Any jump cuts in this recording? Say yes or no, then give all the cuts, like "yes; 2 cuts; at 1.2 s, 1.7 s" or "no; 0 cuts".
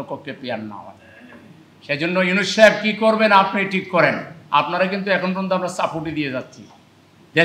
no; 0 cuts